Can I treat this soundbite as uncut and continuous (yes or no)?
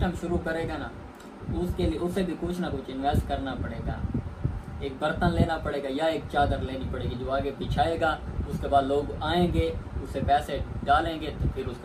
yes